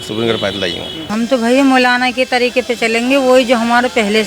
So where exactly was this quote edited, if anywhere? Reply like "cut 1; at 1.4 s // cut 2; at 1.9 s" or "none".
cut 1; at 0.9 s